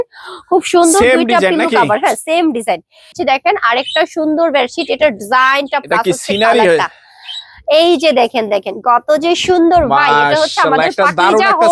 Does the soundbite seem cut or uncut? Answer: cut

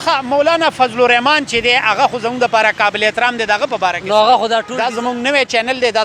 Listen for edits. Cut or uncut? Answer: cut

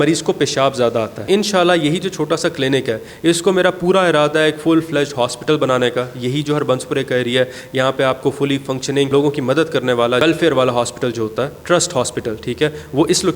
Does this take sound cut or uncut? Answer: cut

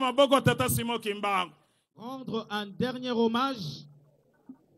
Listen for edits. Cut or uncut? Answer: cut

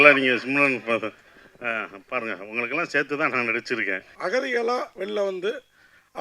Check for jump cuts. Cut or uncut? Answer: cut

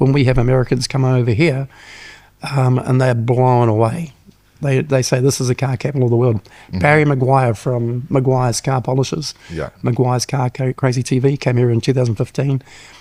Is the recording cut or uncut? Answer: uncut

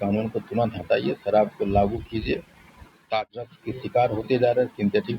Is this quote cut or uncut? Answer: cut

